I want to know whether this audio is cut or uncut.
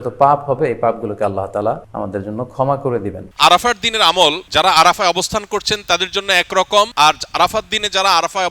cut